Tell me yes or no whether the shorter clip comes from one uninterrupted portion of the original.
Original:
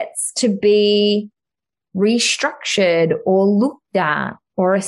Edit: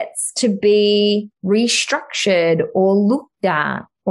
no